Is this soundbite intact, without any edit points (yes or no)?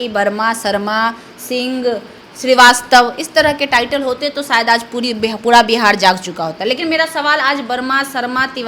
yes